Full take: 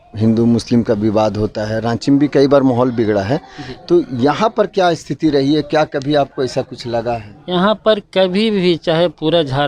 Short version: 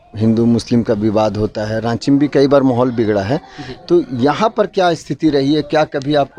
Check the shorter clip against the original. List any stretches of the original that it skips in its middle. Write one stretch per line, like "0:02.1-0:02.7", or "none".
none

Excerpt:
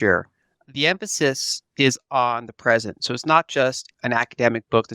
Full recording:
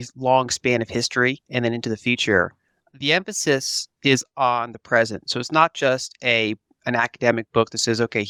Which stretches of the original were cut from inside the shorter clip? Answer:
0:06.1-0:06.7

